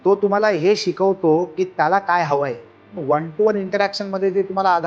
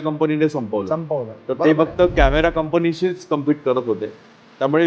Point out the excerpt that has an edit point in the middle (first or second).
first